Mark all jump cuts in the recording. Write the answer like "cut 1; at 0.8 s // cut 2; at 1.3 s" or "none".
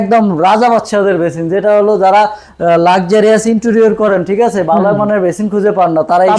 none